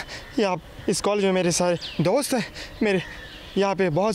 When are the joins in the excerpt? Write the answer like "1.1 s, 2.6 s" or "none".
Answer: none